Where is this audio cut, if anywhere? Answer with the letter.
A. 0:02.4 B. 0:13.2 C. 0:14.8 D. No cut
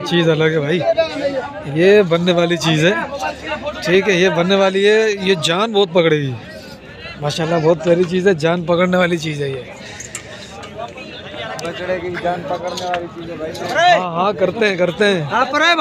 D